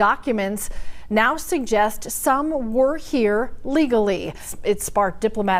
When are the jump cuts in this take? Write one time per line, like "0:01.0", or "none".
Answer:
none